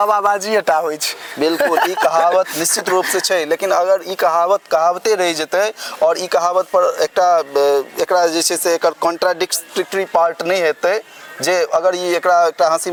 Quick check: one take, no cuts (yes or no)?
yes